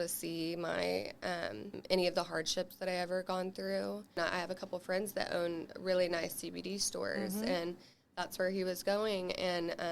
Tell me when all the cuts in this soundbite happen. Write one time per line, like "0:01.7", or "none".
0:01.8
0:04.2